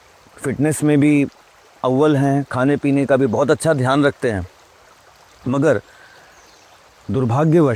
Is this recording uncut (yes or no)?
yes